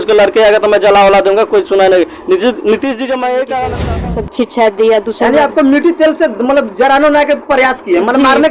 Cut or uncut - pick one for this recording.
cut